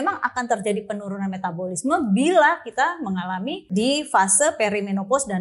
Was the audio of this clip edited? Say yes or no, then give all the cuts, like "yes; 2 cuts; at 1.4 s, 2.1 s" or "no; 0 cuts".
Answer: yes; 1 cut; at 3.6 s